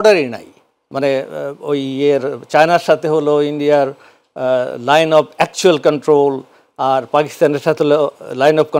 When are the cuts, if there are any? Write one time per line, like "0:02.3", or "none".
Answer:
none